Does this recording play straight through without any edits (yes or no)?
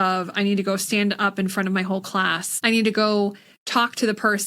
no